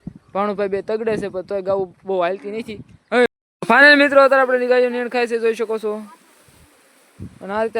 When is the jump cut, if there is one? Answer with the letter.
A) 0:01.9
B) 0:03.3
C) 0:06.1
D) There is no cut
B